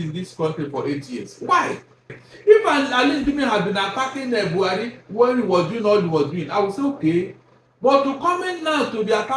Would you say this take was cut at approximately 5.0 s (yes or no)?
no